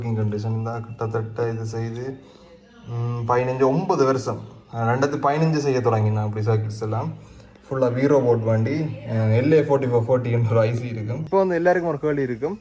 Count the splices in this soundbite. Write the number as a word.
one